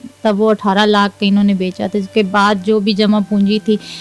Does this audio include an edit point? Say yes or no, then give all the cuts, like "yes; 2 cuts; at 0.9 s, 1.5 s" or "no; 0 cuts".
no; 0 cuts